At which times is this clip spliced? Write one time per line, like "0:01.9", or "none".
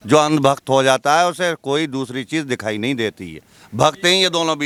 none

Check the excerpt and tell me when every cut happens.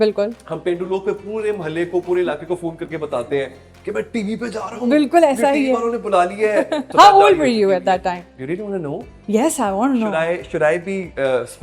0:06.9

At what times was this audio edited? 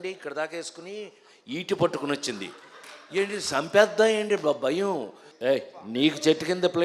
0:05.2

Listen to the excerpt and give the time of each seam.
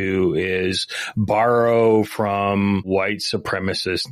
0:02.8

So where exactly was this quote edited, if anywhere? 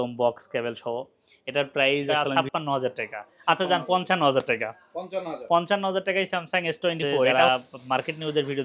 0:02.1
0:07.5

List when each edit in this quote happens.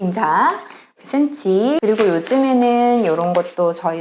0:01.0
0:01.8

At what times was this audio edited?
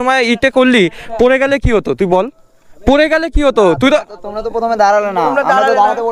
none

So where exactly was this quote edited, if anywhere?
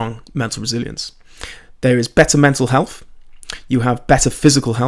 none

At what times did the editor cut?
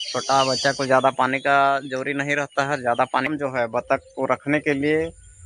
0:03.3

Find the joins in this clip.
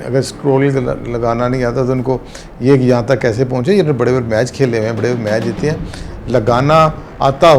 none

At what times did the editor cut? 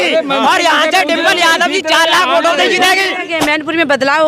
0:03.2

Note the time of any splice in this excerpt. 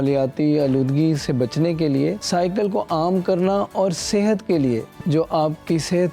0:02.2
0:04.9

